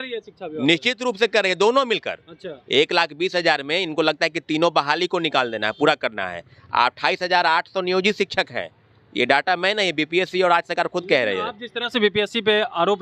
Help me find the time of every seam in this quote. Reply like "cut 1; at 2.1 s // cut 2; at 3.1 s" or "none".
none